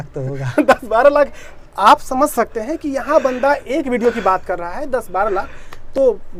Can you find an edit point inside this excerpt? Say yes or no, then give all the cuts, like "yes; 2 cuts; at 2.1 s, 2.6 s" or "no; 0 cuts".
no; 0 cuts